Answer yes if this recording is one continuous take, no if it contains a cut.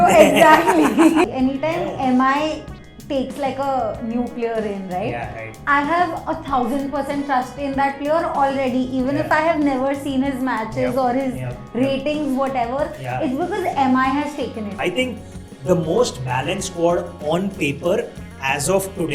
no